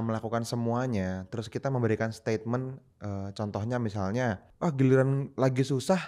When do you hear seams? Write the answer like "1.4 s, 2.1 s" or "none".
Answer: 4.5 s